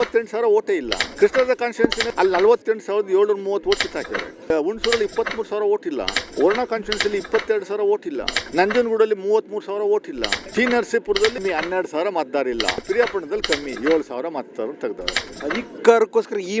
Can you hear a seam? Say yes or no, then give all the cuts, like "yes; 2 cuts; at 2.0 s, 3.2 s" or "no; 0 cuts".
yes; 9 cuts; at 1.0 s, 2.0 s, 4.5 s, 6.2 s, 8.4 s, 10.3 s, 11.4 s, 12.9 s, 15.3 s